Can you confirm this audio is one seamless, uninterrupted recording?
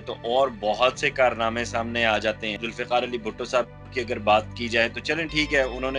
no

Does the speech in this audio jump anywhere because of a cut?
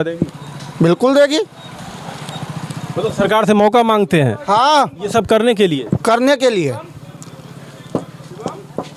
no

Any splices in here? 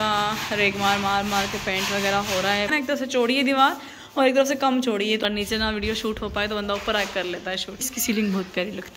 yes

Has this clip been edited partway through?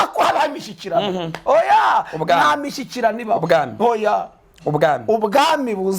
no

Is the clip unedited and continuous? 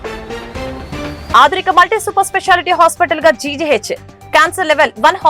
no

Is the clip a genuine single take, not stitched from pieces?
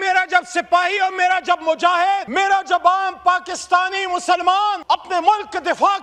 no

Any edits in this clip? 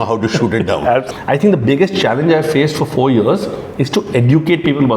yes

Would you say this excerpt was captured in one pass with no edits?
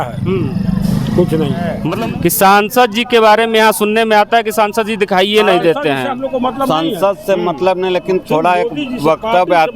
no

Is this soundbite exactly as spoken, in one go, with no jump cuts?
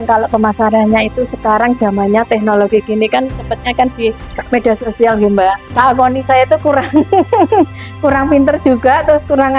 no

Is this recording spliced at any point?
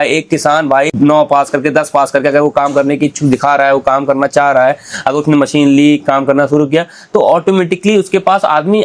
yes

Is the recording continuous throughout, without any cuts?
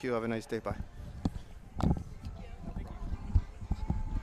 yes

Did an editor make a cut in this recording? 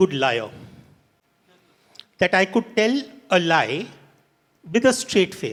no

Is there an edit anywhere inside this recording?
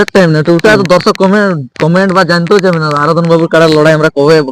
no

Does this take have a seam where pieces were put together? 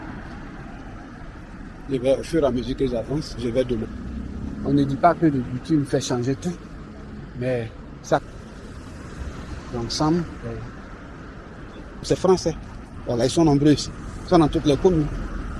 yes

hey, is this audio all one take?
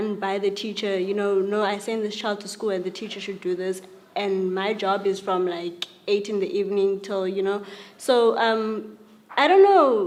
yes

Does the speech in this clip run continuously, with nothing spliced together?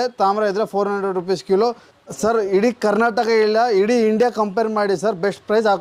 no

